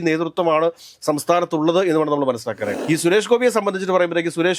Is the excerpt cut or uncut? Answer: cut